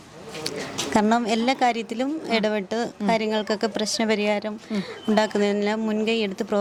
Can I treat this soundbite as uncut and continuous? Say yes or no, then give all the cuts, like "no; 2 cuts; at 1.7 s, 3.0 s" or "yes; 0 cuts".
yes; 0 cuts